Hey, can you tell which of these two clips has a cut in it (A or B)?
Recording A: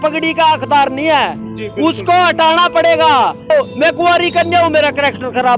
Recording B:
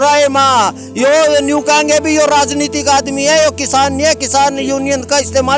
A